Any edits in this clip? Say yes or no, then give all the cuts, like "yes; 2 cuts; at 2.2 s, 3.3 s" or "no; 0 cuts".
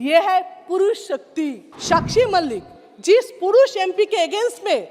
yes; 1 cut; at 1.7 s